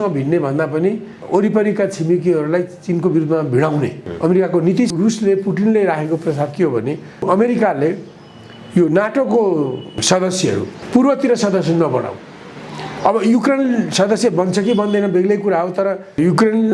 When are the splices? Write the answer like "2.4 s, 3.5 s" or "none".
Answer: 1.2 s, 4.0 s, 4.9 s, 7.2 s, 10.3 s